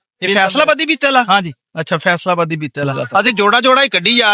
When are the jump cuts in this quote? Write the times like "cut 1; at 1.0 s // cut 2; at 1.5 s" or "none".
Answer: cut 1; at 2.9 s

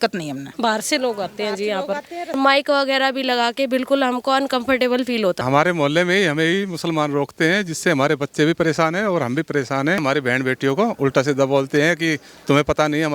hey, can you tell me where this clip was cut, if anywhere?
cut 1; at 2.3 s // cut 2; at 5.4 s // cut 3; at 10.0 s

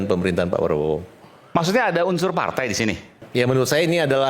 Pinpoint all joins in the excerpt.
cut 1; at 3.2 s

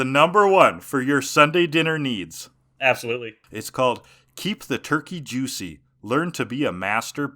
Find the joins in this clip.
cut 1; at 3.4 s

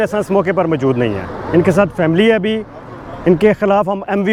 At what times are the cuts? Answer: none

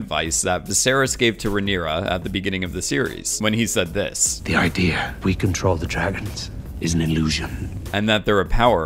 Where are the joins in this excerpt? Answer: none

